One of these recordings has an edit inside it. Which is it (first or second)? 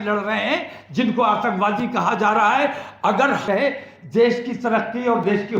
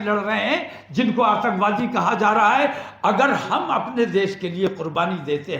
first